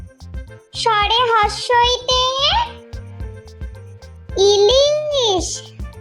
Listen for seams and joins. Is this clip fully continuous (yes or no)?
no